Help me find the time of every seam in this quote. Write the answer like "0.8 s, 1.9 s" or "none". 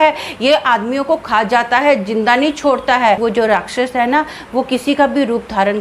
3.2 s